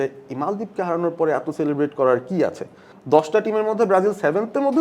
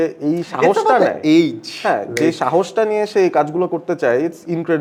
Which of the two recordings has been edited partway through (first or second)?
first